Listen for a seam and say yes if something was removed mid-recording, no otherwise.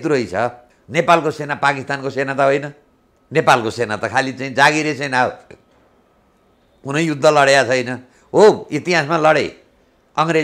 no